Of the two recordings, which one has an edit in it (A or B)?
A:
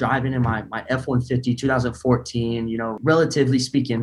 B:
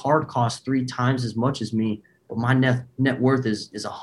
A